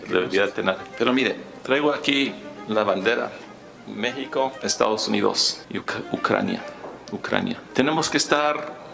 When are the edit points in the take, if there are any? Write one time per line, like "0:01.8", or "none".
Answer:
0:00.9
0:04.6
0:05.5
0:07.6